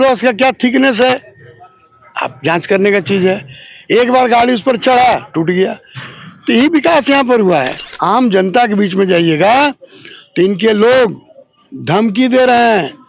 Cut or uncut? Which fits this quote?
cut